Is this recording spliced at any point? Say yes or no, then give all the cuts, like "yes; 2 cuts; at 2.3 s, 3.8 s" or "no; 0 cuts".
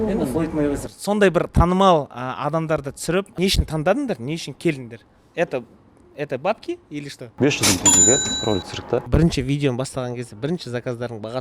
yes; 3 cuts; at 3.3 s, 7.3 s, 9.1 s